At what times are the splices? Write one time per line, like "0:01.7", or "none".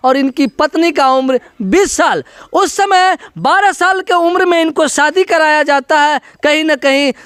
none